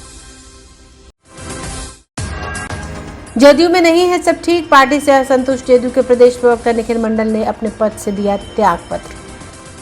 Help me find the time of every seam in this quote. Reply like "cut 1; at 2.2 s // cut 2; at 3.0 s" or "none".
cut 1; at 1.0 s